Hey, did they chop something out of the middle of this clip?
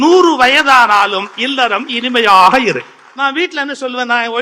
yes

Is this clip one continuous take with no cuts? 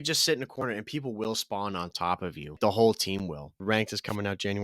no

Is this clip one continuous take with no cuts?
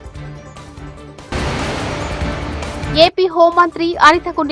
no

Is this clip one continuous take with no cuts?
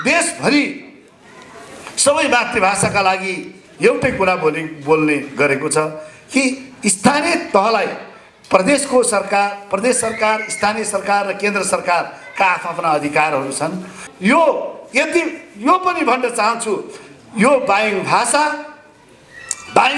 no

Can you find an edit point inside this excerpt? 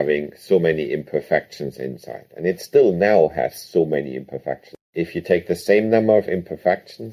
no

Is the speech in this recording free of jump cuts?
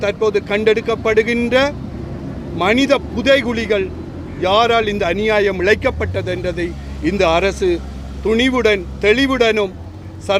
yes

